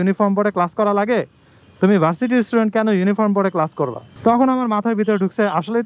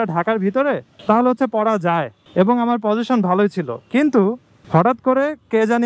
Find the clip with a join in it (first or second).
first